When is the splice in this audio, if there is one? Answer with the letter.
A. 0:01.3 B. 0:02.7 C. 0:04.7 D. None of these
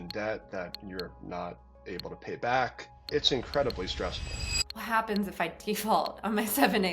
C